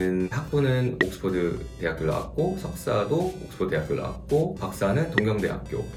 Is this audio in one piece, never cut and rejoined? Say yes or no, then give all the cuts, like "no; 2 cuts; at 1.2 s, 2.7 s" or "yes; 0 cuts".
yes; 0 cuts